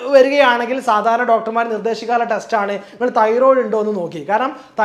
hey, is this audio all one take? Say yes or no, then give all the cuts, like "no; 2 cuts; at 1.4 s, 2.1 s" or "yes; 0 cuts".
yes; 0 cuts